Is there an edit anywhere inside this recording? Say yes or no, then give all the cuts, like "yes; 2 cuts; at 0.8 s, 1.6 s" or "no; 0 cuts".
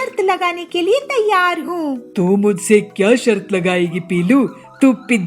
no; 0 cuts